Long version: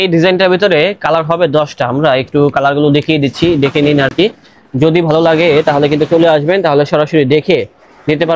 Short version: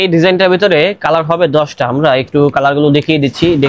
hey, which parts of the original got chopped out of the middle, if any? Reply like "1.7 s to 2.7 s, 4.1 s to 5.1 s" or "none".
none